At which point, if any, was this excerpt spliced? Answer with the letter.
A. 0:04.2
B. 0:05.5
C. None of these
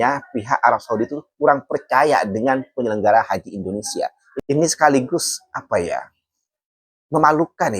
A